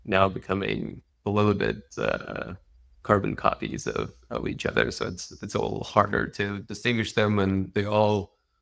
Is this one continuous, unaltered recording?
yes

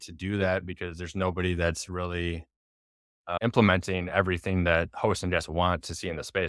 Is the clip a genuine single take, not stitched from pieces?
yes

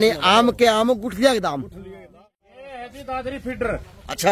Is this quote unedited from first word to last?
no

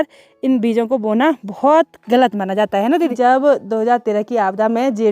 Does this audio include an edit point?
yes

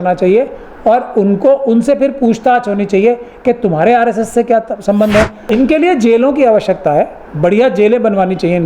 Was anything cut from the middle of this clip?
yes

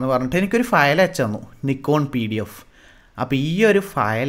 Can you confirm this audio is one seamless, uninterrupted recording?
yes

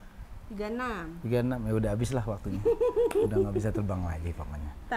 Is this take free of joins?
yes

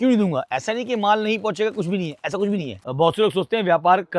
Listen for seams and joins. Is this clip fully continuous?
no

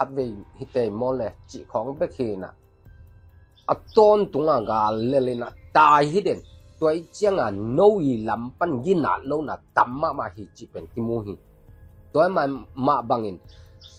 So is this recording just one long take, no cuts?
yes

